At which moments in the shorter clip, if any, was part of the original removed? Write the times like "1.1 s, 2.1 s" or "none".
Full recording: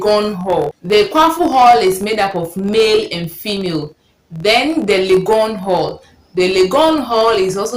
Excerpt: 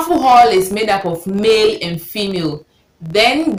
none